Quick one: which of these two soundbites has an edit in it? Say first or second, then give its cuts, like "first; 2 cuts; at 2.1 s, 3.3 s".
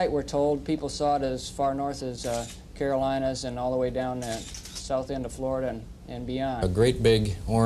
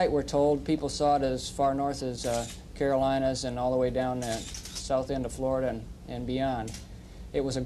second; 1 cut; at 6.6 s